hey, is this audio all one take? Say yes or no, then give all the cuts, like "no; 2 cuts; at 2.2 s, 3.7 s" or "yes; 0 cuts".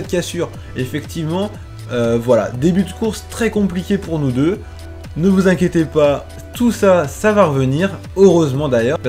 yes; 0 cuts